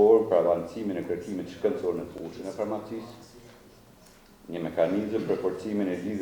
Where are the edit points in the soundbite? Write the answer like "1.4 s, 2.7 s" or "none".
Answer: none